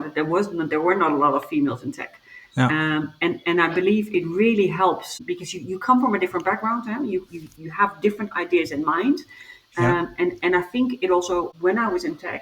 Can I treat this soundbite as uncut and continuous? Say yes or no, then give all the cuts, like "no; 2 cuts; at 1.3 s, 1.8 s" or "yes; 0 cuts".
no; 2 cuts; at 5.2 s, 11.5 s